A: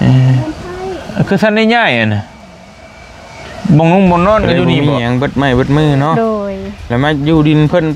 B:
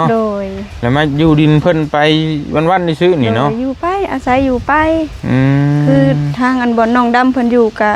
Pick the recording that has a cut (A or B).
A